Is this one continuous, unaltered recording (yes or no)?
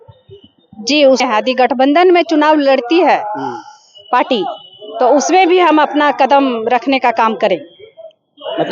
no